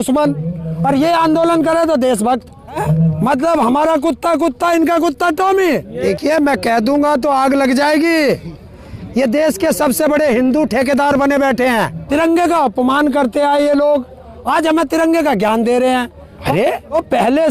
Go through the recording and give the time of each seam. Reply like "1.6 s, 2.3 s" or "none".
2.8 s, 5.9 s, 12.0 s, 16.5 s